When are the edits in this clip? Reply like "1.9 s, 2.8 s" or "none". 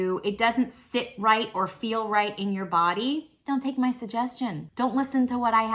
3.3 s, 4.6 s